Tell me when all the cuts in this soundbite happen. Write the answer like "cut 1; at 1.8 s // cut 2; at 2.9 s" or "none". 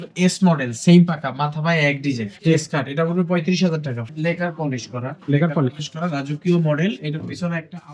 cut 1; at 2.3 s // cut 2; at 4.1 s